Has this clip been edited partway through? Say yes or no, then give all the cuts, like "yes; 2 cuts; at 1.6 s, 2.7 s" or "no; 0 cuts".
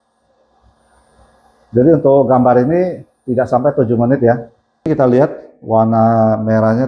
yes; 1 cut; at 4.9 s